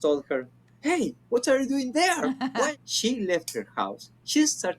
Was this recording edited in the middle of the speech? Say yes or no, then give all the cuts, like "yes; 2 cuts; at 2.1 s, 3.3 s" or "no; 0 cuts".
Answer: yes; 1 cut; at 2.7 s